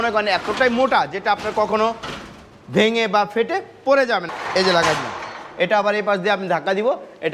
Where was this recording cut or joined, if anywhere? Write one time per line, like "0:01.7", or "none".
0:04.3